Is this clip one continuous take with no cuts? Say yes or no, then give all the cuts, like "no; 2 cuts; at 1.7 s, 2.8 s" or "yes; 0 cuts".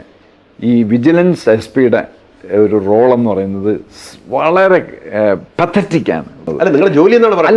no; 1 cut; at 6.5 s